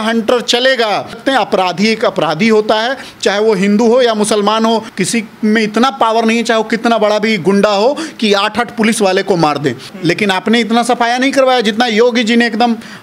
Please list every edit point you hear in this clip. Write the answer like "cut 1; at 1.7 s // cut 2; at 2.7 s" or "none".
cut 1; at 1.2 s // cut 2; at 4.9 s // cut 3; at 9.9 s